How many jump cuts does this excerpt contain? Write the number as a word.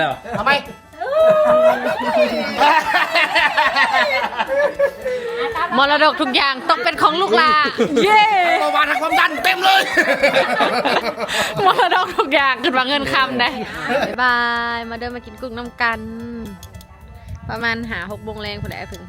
one